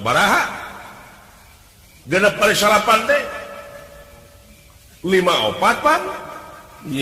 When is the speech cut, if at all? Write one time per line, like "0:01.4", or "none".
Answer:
none